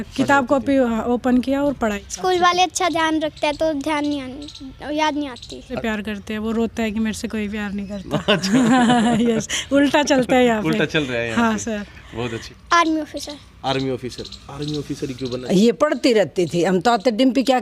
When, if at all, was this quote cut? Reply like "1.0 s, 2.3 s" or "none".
1.8 s, 5.8 s, 12.4 s, 15.4 s